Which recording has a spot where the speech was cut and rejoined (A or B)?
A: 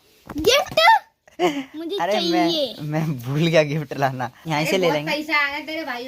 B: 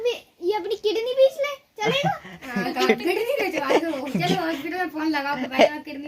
A